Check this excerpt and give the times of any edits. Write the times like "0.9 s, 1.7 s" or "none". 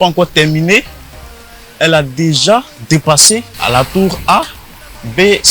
3.5 s

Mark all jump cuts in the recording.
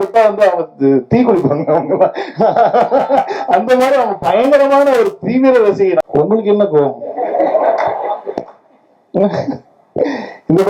6.0 s

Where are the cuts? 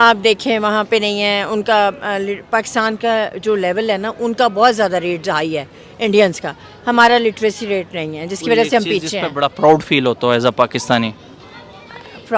none

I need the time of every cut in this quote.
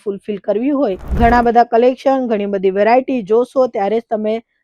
1.0 s

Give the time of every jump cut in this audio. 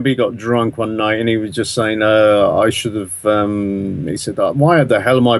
none

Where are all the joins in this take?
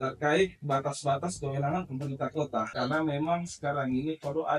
2.7 s

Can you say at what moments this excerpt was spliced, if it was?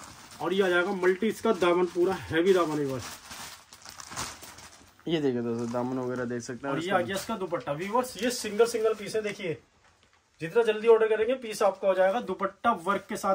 none

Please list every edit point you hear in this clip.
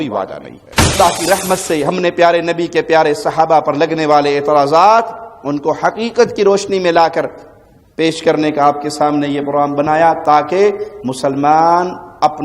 0.9 s

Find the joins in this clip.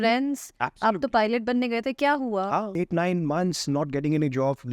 2.7 s

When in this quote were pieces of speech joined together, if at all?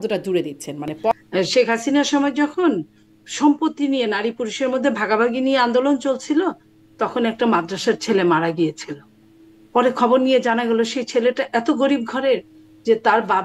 1.1 s

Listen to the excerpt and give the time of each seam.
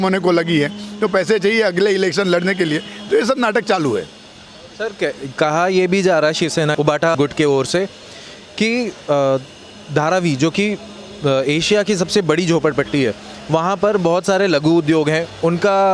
none

